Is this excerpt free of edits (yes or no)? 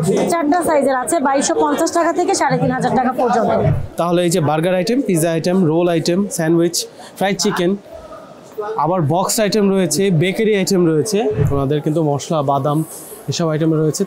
no